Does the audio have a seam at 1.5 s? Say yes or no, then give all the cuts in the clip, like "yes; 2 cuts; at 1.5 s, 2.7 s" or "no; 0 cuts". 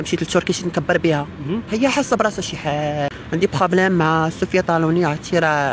no; 1 cut; at 3.1 s